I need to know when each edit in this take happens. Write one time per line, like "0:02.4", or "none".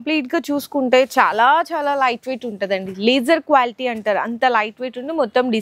none